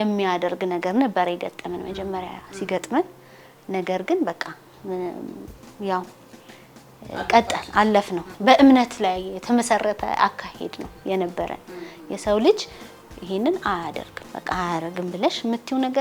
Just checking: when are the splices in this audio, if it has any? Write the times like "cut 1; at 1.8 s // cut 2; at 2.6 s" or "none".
cut 1; at 8.2 s